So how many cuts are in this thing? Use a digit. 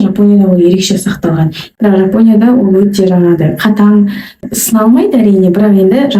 1